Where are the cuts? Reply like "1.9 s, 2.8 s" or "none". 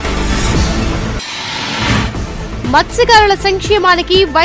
1.1 s